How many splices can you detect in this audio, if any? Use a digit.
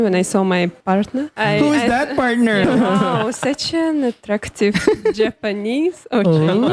2